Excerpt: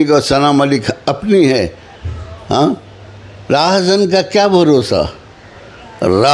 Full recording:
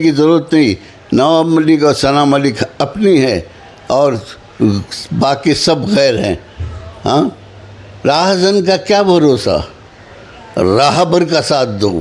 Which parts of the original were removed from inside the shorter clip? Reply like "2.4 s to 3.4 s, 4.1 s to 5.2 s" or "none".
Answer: 3.7 s to 6.5 s